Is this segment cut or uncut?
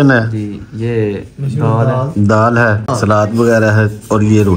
cut